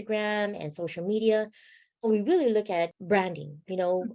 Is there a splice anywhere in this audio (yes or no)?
yes